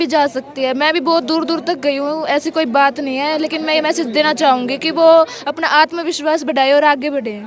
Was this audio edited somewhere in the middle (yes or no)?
no